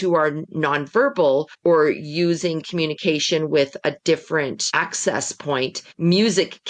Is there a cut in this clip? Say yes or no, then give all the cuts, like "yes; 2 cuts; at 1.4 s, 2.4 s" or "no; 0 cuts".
yes; 3 cuts; at 1.5 s, 4.6 s, 5.8 s